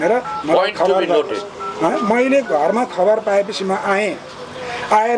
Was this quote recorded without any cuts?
yes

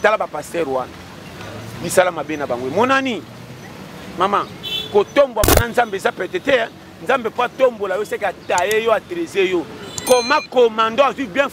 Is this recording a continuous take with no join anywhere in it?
yes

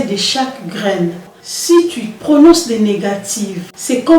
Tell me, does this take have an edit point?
yes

